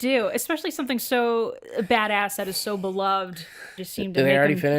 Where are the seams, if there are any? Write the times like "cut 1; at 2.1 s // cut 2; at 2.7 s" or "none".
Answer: cut 1; at 3.8 s